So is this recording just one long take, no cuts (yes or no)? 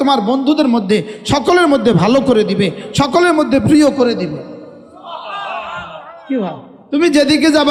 yes